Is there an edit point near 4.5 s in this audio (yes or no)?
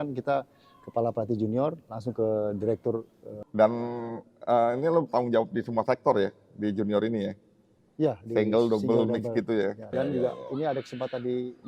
no